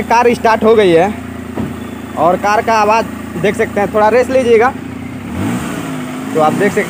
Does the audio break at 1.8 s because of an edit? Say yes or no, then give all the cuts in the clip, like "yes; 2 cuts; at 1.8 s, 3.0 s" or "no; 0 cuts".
no; 0 cuts